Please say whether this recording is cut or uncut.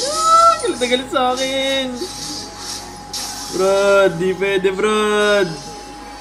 uncut